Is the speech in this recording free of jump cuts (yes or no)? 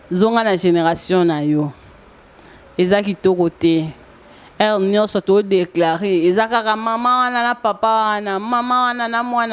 yes